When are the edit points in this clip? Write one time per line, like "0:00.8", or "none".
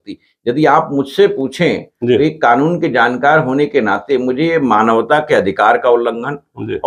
none